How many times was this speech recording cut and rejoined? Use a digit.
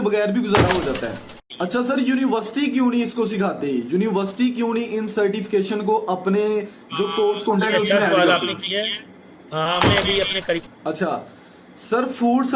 2